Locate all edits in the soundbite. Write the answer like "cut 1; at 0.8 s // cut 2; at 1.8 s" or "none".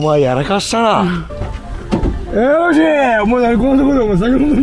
cut 1; at 1.2 s